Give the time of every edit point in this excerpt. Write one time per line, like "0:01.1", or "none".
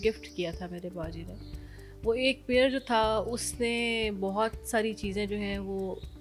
none